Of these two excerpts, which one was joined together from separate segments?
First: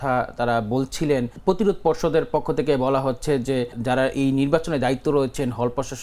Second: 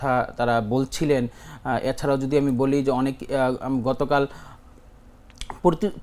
first; 2 cuts; at 1.4 s, 3.8 s

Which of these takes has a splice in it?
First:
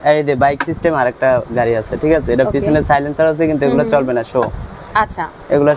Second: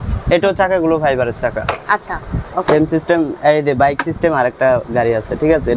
second; 1 cut; at 2.4 s

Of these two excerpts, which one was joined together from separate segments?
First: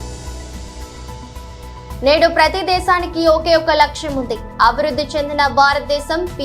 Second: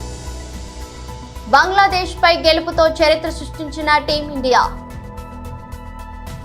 first; 1 cut; at 1.2 s

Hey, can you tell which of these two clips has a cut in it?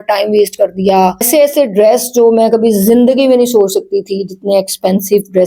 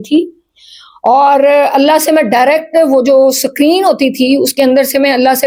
first; 1 cut; at 1.3 s

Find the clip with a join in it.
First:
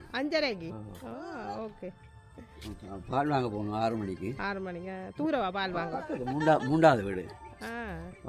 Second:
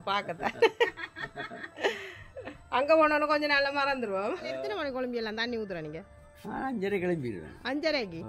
second; 1 cut; at 4.6 s

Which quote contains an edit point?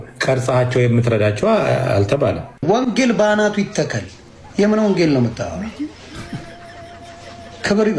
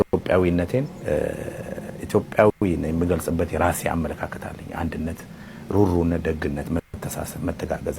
first; 1 cut; at 2.5 s

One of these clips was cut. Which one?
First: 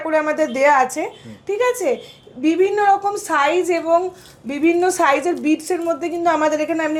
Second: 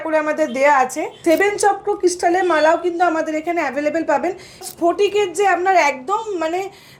second; 2 cuts; at 1.1 s, 4.6 s

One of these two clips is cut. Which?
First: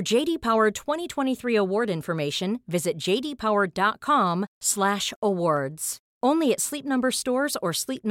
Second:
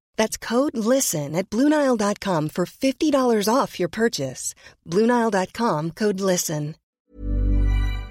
second; 1 cut; at 6.8 s

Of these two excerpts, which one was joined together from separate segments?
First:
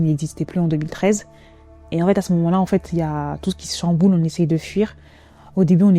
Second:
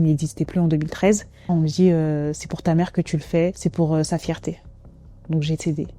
second; 3 cuts; at 1.4 s, 3.6 s, 5.1 s

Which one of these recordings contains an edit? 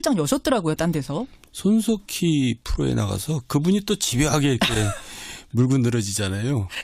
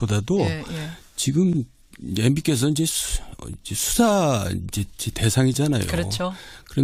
first; 1 cut; at 5.4 s

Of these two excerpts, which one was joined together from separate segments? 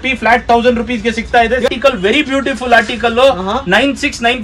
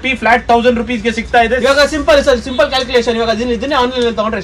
first; 1 cut; at 1.7 s

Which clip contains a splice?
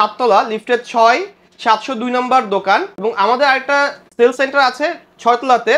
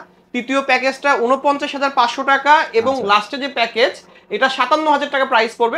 first; 2 cuts; at 2.9 s, 4.0 s

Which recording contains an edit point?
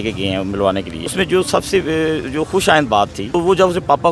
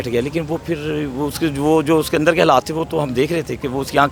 first; 2 cuts; at 1.1 s, 3.2 s

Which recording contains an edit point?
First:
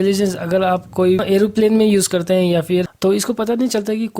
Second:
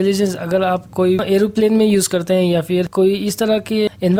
first; 1 cut; at 2.9 s

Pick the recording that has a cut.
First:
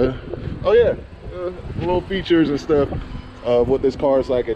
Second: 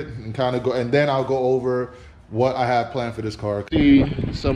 second; 1 cut; at 3.6 s

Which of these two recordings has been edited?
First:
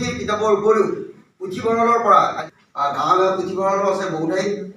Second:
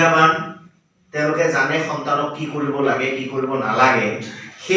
first; 1 cut; at 2.4 s

